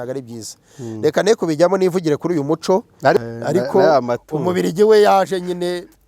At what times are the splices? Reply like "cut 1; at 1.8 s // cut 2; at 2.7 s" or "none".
cut 1; at 3.2 s